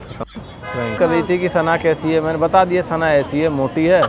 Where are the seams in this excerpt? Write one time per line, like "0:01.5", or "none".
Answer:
0:00.9